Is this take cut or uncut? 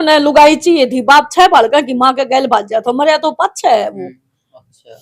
uncut